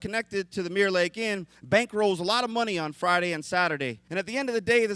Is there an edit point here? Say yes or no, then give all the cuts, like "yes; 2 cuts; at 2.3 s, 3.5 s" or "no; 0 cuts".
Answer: yes; 1 cut; at 4.0 s